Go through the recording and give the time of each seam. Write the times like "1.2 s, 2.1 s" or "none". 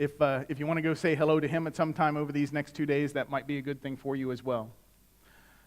3.0 s